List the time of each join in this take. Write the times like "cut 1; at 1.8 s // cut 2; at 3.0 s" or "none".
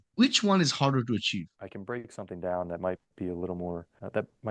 cut 1; at 1.5 s